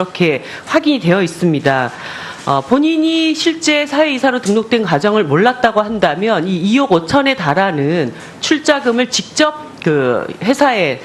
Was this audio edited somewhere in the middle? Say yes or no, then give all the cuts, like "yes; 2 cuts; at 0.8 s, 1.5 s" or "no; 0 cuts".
yes; 1 cut; at 8.5 s